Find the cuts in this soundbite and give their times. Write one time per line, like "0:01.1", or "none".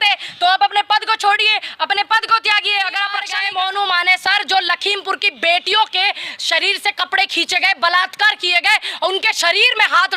0:03.4